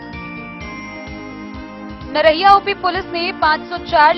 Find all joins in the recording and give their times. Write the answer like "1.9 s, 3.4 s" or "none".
2.0 s